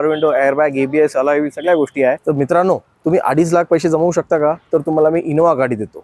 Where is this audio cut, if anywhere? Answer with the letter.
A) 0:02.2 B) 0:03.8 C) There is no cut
A